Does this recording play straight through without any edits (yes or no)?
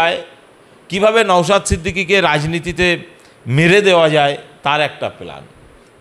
yes